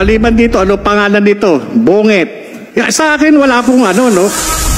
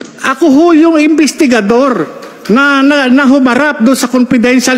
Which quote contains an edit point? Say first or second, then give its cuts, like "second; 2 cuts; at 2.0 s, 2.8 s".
first; 1 cut; at 2.6 s